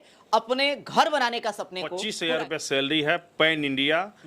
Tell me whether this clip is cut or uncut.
cut